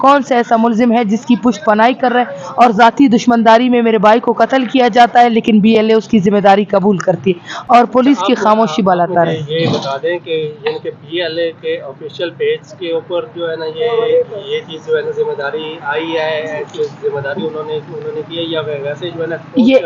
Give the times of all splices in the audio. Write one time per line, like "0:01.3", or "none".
none